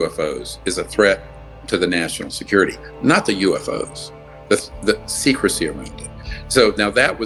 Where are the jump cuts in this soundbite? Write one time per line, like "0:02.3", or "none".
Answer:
none